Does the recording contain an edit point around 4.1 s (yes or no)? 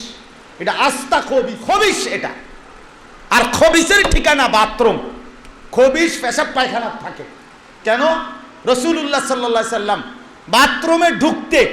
no